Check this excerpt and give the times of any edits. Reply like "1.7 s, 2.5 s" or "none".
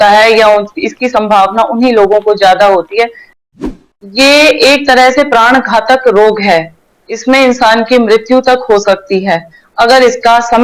3.8 s